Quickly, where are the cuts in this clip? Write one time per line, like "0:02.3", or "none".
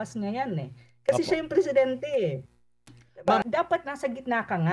0:03.5